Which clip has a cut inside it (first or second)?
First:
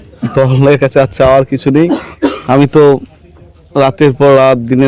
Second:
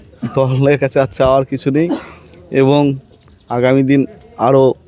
first